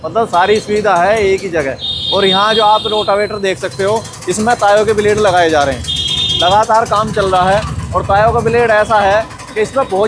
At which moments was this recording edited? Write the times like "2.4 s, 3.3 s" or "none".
none